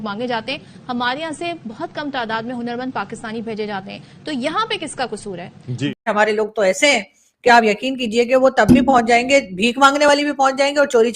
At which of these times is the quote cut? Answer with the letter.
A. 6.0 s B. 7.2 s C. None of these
A